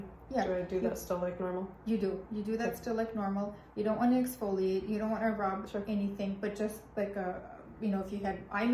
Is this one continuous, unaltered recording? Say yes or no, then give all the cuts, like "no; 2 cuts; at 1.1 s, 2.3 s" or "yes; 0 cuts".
yes; 0 cuts